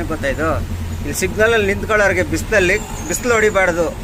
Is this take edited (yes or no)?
no